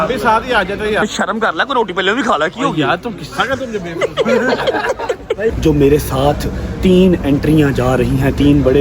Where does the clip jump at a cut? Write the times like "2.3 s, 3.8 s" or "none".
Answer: 1.0 s, 5.6 s